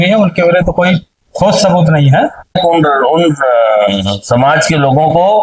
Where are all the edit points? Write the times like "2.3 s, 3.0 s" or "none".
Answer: 2.6 s